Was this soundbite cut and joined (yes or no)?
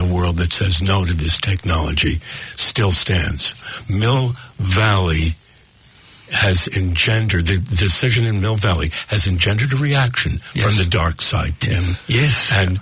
no